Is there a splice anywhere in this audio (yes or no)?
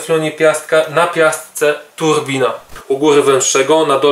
yes